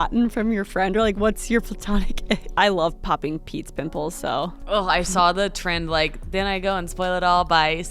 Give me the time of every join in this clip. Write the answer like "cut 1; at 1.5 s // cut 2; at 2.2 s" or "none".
cut 1; at 2.5 s // cut 2; at 4.6 s